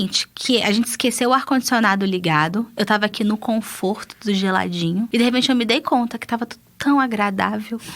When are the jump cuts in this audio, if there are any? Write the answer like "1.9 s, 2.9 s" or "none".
5.1 s